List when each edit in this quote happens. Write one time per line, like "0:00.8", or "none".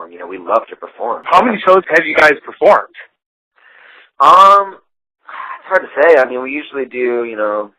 none